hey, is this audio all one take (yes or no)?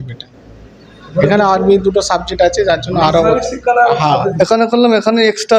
no